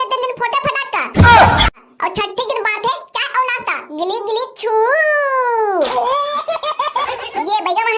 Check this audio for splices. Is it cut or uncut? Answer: cut